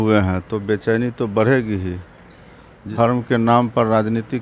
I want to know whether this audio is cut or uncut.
cut